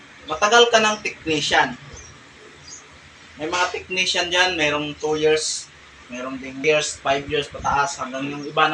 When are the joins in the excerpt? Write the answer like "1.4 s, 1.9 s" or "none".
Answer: 6.6 s